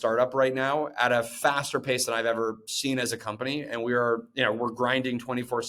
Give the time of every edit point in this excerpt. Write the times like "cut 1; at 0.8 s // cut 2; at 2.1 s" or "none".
none